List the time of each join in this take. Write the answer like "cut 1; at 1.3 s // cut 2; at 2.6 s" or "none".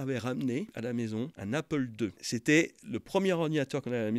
cut 1; at 1.0 s // cut 2; at 2.3 s